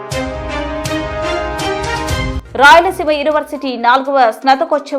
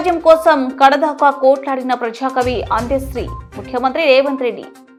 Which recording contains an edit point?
first; 1 cut; at 2.4 s

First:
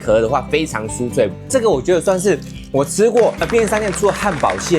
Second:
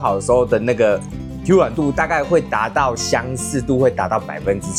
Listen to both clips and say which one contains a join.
first; 1 cut; at 1.5 s

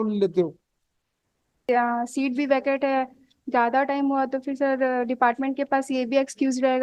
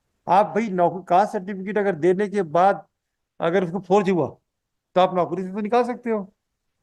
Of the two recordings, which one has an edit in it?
first; 1 cut; at 1.7 s

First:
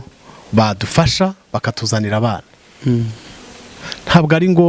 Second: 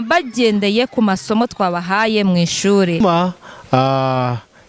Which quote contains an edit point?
second; 1 cut; at 3.0 s

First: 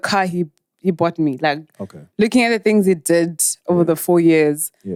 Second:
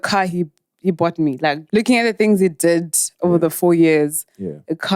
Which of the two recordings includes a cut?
second; 1 cut; at 1.6 s

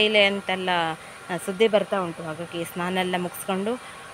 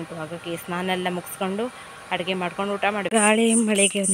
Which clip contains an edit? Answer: second; 1 cut; at 3.1 s

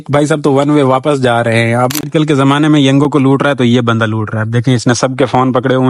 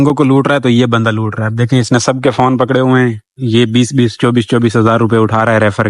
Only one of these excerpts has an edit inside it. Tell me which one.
first; 1 cut; at 2.0 s

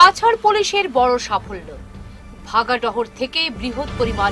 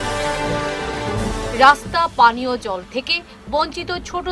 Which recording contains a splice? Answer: second; 1 cut; at 1.1 s

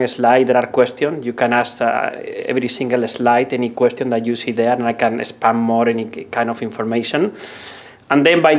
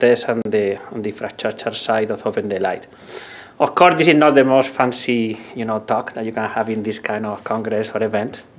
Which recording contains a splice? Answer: first; 1 cut; at 6.2 s

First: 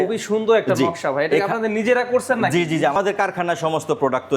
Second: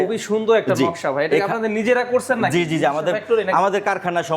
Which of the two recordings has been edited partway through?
first; 1 cut; at 3.0 s

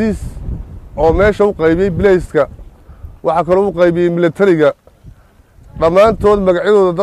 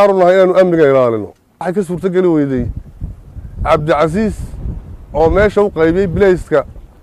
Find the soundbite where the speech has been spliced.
second; 1 cut; at 1.7 s

